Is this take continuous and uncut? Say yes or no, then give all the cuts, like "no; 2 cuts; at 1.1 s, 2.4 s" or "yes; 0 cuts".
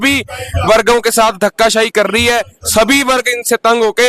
yes; 0 cuts